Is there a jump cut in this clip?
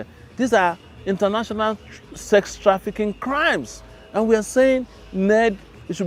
no; 0 cuts

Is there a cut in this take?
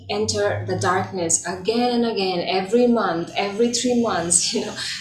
no; 0 cuts

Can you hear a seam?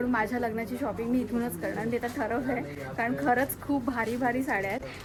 no; 0 cuts

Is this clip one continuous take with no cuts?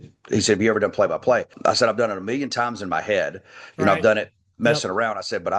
no; 1 cut; at 1.5 s

